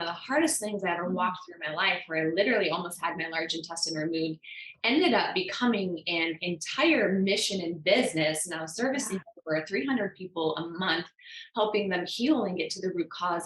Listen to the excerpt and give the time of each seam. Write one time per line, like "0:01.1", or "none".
none